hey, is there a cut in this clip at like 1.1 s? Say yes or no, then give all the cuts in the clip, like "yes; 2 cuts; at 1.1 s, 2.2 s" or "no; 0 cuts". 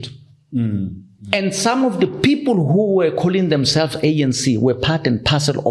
no; 0 cuts